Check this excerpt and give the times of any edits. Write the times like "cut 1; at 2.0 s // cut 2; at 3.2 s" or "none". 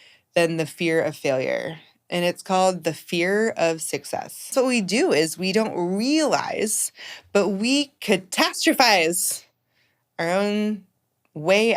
cut 1; at 4.5 s

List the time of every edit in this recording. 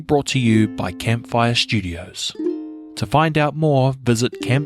cut 1; at 2.8 s

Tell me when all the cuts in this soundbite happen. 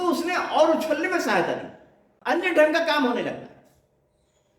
cut 1; at 2.2 s

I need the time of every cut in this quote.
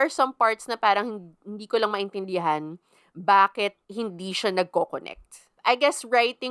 cut 1; at 3.8 s // cut 2; at 5.5 s

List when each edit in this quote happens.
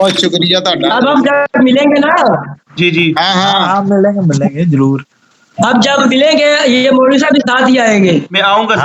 none

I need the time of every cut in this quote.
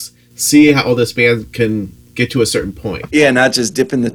cut 1; at 3.0 s

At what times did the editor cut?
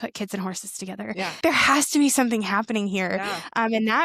cut 1; at 1.4 s

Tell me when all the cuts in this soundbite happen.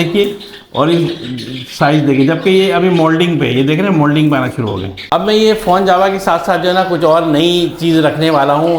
cut 1; at 5.1 s

